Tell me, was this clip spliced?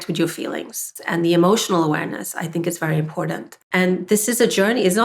yes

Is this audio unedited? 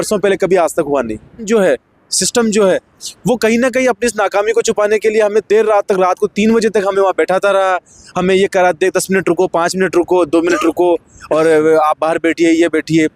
no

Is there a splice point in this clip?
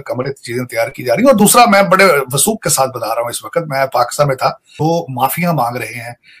yes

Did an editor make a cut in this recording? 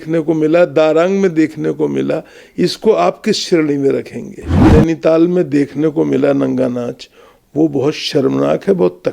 yes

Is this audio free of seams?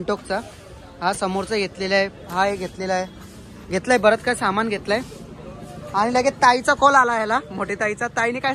yes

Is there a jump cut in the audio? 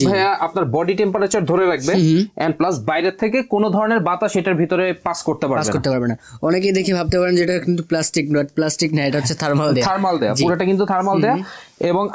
no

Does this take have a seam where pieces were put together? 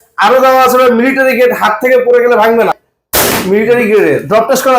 yes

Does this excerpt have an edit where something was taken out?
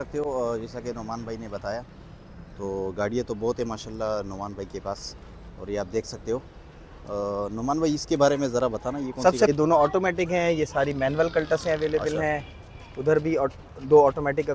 yes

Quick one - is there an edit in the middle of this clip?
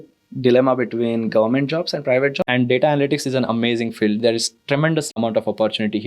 yes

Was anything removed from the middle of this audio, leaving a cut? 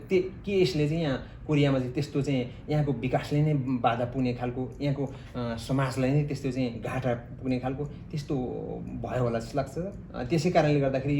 no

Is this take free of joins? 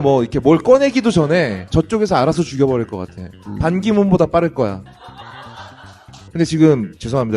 no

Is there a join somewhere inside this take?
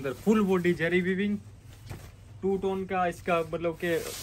no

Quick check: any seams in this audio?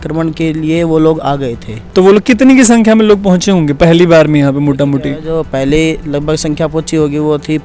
yes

